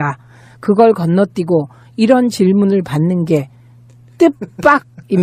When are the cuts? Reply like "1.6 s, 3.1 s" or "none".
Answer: 2.7 s